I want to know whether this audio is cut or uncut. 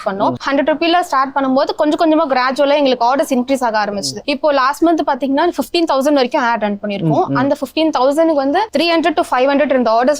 uncut